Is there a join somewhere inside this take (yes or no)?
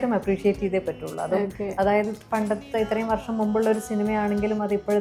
no